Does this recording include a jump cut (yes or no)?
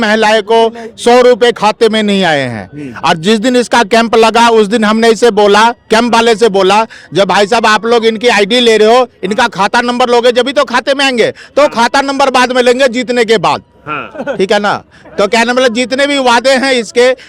no